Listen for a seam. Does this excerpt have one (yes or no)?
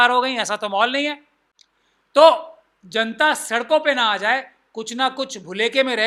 no